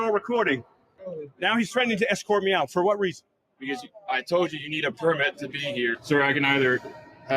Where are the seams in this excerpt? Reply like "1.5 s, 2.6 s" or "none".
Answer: 1.1 s, 6.0 s